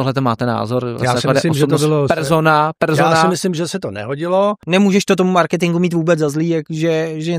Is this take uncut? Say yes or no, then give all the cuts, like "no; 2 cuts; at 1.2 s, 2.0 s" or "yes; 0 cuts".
no; 1 cut; at 4.6 s